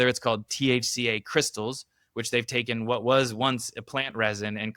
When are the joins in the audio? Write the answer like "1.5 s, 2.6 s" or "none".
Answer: none